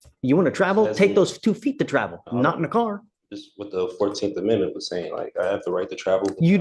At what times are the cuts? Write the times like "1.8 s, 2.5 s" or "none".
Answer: none